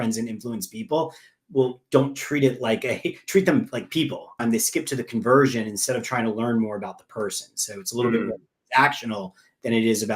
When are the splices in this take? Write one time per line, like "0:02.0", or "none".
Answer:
0:04.4

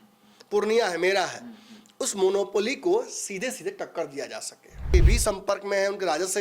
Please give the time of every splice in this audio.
0:04.9

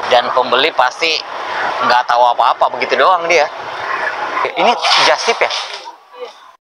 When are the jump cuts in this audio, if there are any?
0:04.4

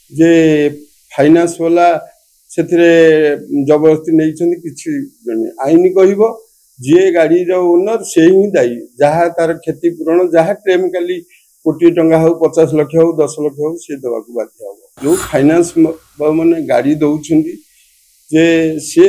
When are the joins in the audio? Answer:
0:14.9

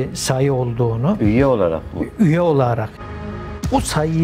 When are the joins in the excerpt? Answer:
0:03.0

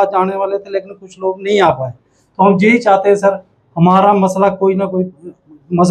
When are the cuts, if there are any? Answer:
none

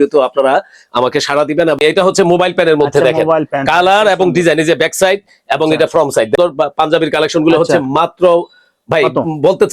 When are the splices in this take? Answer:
0:01.8
0:06.4

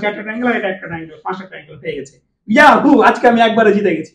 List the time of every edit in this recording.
none

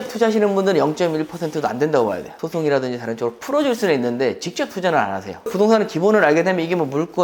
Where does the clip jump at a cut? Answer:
0:02.4
0:05.4

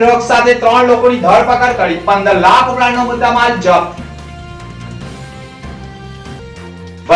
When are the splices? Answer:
none

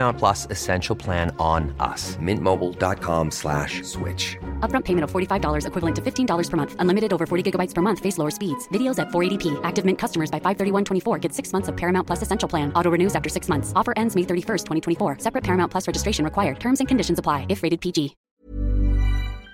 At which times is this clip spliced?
0:18.2

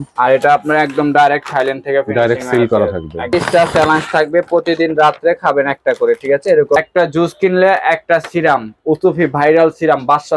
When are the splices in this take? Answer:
0:03.3
0:06.8

